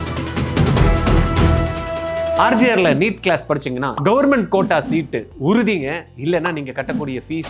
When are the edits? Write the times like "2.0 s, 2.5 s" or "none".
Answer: 2.4 s